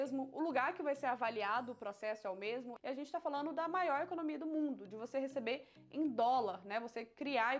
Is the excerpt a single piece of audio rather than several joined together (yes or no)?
no